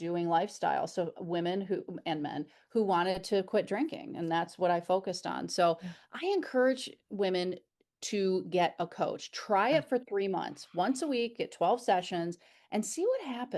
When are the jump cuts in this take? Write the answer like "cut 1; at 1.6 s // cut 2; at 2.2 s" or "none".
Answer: none